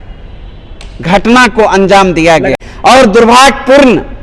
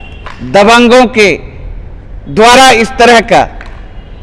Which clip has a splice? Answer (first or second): first